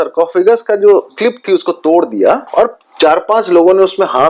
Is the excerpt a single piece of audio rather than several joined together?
no; 2 cuts; at 1.2 s, 2.5 s

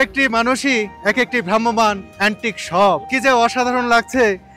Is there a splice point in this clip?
yes; 3 cuts; at 0.9 s, 2.1 s, 3.1 s

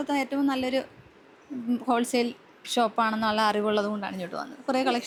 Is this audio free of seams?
yes; 0 cuts

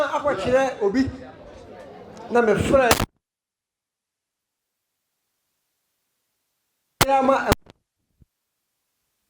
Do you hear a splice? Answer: no; 0 cuts

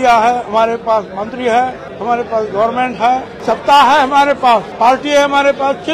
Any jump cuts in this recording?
yes; 3 cuts; at 1.9 s, 3.3 s, 4.7 s

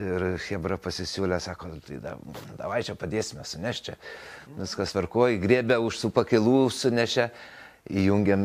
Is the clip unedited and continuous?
yes; 0 cuts

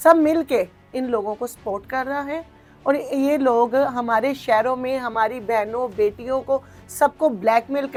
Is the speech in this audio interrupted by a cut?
no; 0 cuts

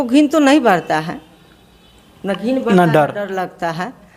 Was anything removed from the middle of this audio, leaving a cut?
no; 0 cuts

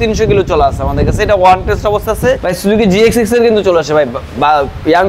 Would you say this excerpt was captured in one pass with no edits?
no; 1 cut; at 2.5 s

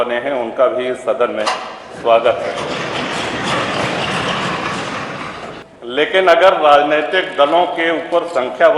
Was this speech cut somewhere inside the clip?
yes; 1 cut; at 5.5 s

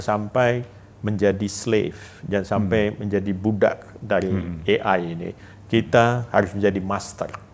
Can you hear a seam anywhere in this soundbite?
no; 0 cuts

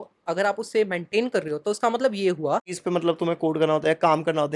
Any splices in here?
yes; 1 cut; at 2.7 s

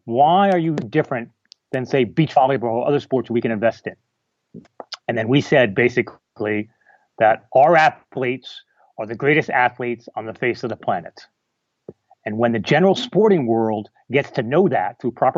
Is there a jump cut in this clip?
no; 0 cuts

